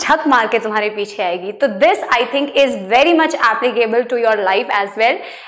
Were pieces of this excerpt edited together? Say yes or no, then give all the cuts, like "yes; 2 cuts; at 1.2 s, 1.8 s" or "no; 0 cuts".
no; 0 cuts